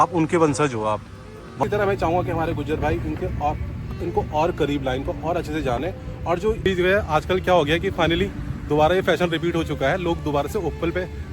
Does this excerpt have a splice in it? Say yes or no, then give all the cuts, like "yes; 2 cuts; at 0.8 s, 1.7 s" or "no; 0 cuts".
yes; 2 cuts; at 1.6 s, 6.7 s